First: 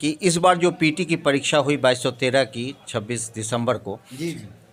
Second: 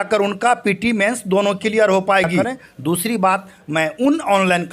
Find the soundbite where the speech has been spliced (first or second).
second